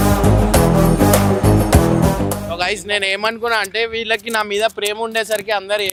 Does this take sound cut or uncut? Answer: uncut